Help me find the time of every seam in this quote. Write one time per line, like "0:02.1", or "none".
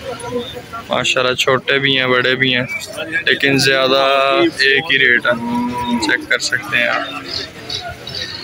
none